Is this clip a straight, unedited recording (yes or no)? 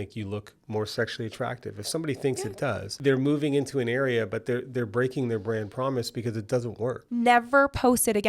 no